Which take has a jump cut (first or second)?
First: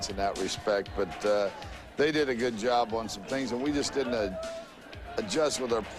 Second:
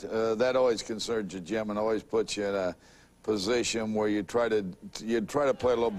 second